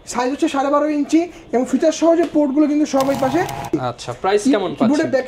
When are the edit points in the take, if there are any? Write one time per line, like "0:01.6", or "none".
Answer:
0:03.7